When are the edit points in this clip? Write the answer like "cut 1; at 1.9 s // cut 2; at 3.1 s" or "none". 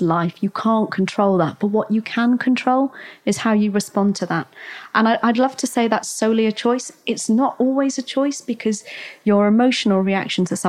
none